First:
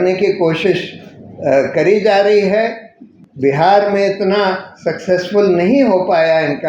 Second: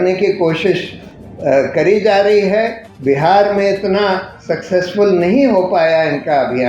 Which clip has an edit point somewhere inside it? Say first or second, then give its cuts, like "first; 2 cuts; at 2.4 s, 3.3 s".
second; 1 cut; at 2.8 s